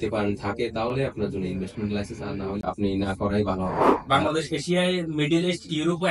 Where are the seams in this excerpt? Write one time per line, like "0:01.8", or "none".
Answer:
0:02.6
0:03.9